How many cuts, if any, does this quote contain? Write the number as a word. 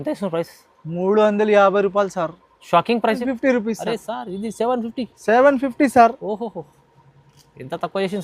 one